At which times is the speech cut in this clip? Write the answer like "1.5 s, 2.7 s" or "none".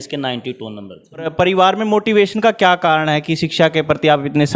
1.3 s